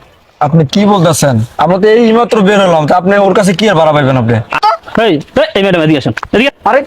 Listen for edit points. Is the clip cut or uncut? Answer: cut